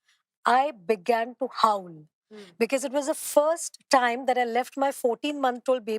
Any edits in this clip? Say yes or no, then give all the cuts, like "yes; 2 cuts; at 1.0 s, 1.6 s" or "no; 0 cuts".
no; 0 cuts